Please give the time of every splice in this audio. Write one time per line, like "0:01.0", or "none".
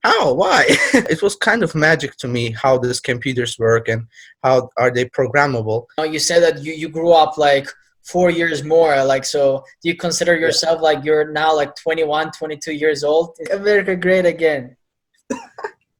0:01.1
0:05.9
0:13.4